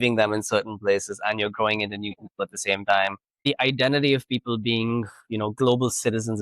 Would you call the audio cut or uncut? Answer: cut